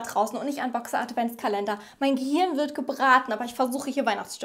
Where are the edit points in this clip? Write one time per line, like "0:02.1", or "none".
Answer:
none